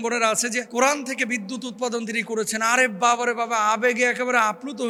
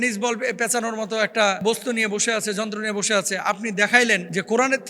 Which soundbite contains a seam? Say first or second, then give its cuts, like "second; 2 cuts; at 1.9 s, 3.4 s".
second; 1 cut; at 1.6 s